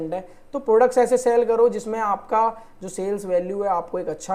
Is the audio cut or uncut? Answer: uncut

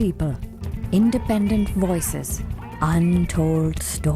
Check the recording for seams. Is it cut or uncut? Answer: uncut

